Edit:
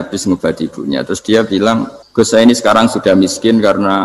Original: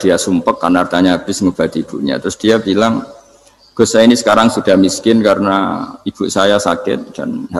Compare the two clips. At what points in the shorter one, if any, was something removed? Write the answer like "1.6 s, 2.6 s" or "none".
2.0 s